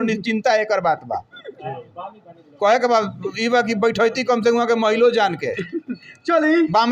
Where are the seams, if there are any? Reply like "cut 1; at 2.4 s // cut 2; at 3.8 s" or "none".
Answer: none